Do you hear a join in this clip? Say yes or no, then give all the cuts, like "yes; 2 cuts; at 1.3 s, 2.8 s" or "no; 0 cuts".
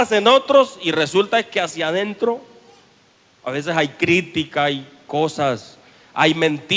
no; 0 cuts